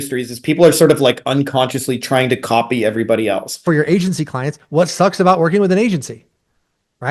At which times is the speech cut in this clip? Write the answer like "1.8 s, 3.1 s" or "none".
3.6 s